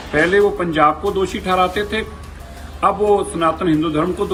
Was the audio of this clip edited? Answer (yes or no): no